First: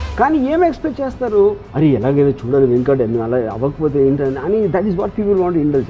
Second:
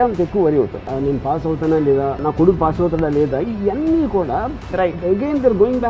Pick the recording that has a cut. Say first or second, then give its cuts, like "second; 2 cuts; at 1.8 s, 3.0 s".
second; 2 cuts; at 0.9 s, 2.2 s